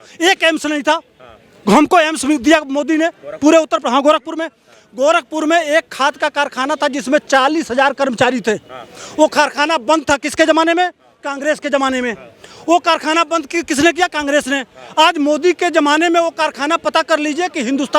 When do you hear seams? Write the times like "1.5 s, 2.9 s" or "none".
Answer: none